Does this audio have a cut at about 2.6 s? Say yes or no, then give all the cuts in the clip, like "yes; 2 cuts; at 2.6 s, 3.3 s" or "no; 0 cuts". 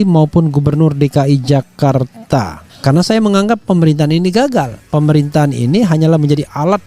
yes; 1 cut; at 2.6 s